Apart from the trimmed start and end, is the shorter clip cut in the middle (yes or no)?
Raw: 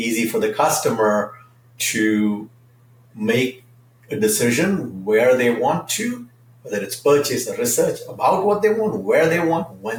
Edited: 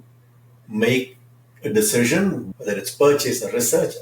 yes